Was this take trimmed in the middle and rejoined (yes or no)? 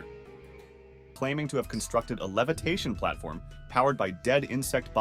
yes